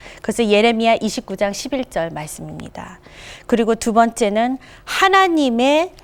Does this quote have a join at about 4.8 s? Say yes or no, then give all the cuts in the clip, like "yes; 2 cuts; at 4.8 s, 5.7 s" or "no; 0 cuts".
no; 0 cuts